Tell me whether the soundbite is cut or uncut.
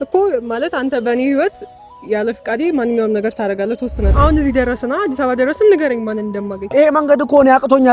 cut